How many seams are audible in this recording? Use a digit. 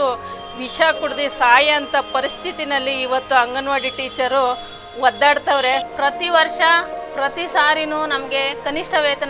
1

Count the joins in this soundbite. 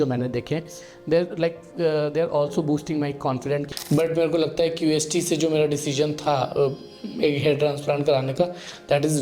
1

